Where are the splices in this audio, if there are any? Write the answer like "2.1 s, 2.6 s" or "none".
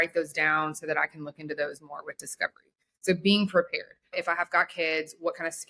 4.1 s

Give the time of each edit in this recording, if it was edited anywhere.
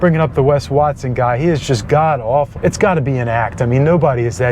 2.5 s

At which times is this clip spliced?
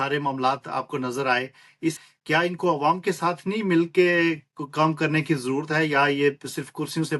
2.1 s

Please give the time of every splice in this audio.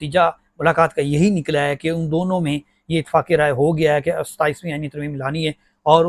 none

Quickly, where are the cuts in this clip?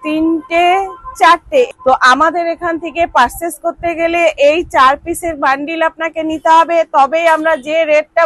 1.7 s

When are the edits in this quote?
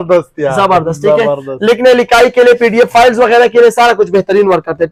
none

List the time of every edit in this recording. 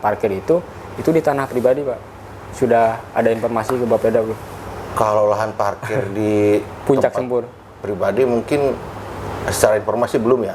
none

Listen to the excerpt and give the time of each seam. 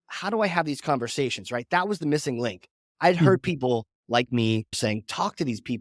4.8 s

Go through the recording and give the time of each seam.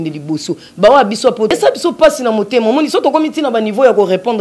1.5 s

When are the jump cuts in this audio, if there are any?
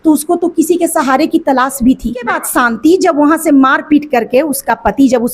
2.3 s

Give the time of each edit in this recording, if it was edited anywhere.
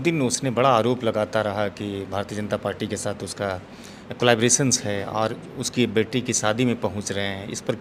none

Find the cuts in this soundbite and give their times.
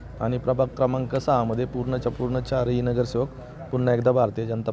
none

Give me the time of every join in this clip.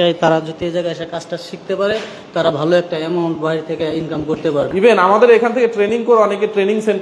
4.7 s

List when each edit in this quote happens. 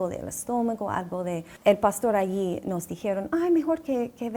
1.5 s

